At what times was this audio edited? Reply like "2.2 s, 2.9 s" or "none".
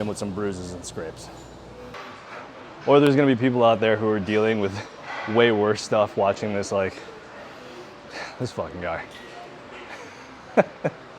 2.0 s